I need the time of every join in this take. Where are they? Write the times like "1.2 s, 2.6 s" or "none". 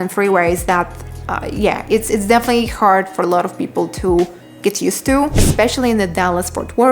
5.3 s